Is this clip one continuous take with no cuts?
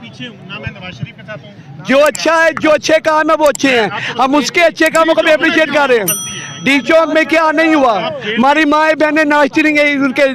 yes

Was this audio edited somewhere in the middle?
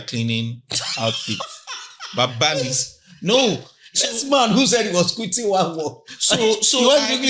no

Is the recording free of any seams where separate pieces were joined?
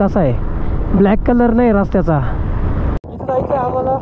no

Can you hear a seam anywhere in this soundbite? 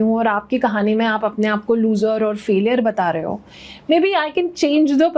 no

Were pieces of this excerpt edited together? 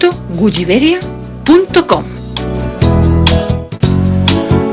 yes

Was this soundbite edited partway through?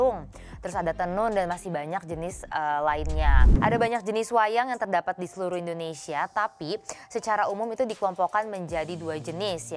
yes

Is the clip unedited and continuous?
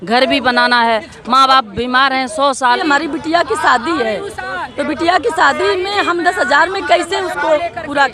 no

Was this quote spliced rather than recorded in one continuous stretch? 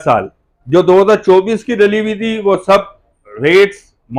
no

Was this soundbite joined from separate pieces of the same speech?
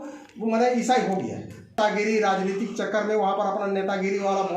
yes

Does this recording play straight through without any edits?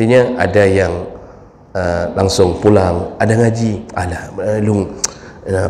yes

